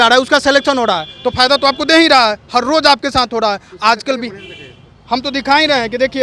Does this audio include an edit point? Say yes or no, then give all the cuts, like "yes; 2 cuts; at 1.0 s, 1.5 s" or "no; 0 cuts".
no; 0 cuts